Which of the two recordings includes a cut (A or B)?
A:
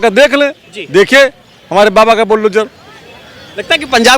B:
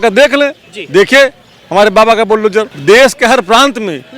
B